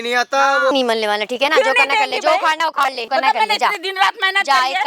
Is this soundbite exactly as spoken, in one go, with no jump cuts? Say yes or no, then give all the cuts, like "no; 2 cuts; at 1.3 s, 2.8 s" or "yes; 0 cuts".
no; 2 cuts; at 0.7 s, 3.0 s